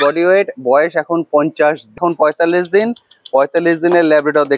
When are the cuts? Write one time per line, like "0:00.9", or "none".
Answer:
0:02.0